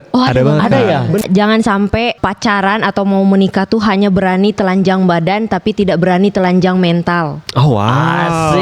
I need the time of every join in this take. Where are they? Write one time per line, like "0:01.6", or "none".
0:01.2
0:02.2